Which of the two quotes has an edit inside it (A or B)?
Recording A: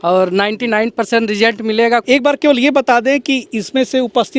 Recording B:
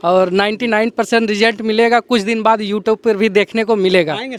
A